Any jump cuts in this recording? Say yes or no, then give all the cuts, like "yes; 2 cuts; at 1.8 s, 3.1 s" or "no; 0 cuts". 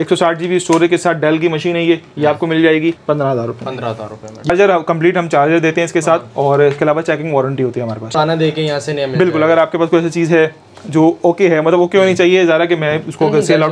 yes; 3 cuts; at 3.0 s, 4.5 s, 8.1 s